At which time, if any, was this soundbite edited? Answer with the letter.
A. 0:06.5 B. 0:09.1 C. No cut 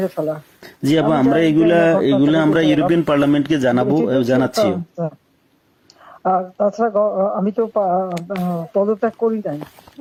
C